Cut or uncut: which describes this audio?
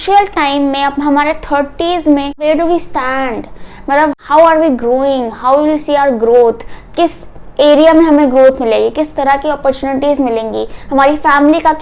uncut